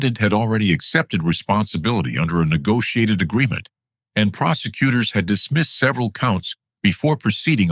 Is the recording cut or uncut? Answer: uncut